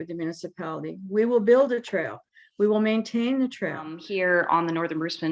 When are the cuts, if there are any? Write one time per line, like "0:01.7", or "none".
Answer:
0:03.9